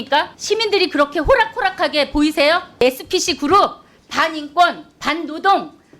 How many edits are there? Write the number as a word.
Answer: one